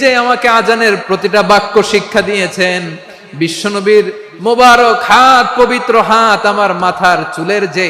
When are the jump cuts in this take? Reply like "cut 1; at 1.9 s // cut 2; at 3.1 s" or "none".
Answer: cut 1; at 1.0 s